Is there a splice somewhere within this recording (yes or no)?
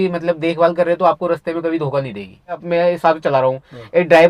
yes